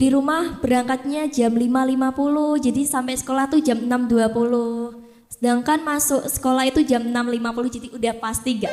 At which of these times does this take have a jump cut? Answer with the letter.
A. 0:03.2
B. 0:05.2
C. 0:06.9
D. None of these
D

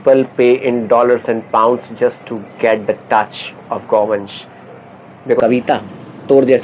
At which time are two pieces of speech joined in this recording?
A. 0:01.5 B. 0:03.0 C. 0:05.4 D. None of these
C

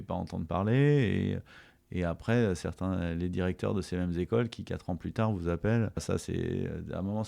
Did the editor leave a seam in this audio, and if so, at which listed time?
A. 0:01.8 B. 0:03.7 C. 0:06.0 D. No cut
C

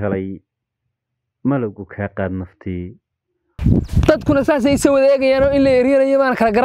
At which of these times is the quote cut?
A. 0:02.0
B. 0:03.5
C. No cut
B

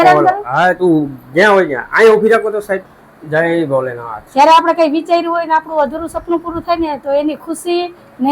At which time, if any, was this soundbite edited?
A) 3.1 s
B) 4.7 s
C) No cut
A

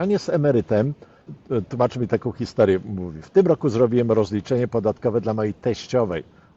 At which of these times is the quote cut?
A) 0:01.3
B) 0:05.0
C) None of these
A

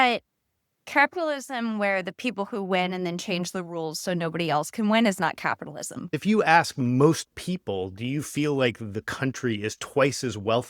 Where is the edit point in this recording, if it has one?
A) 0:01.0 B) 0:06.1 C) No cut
B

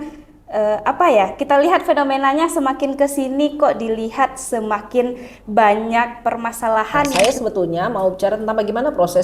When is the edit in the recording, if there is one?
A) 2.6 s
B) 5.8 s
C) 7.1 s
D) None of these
C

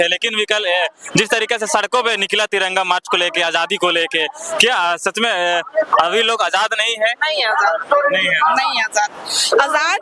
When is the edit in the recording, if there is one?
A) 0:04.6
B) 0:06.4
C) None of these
C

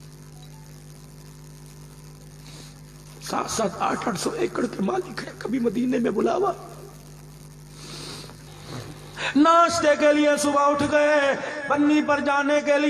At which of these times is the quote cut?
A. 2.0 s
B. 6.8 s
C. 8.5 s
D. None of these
C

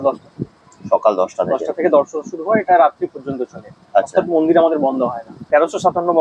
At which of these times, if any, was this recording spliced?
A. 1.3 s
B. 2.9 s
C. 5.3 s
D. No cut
C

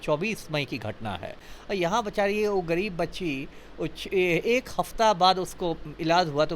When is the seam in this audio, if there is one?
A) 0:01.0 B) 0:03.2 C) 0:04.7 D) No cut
A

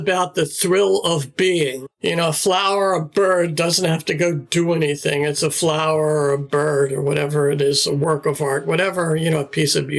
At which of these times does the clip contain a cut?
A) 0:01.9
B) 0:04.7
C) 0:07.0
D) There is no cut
A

